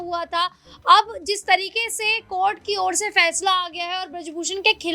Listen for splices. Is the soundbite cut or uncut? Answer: uncut